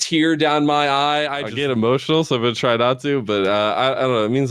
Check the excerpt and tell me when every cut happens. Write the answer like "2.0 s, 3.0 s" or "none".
1.4 s